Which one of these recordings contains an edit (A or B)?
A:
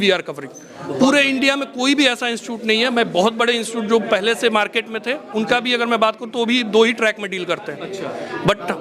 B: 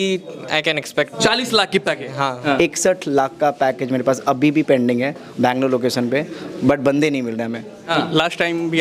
B